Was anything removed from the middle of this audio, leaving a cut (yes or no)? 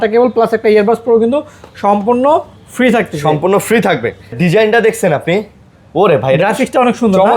yes